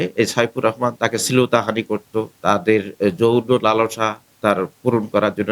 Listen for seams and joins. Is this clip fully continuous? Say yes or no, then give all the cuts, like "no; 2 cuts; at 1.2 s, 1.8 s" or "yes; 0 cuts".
no; 3 cuts; at 1.0 s, 2.3 s, 4.3 s